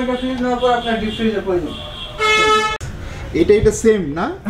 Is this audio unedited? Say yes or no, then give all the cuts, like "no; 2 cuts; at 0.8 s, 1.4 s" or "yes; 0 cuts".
no; 1 cut; at 2.7 s